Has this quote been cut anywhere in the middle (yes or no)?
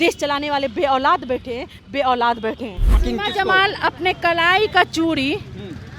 yes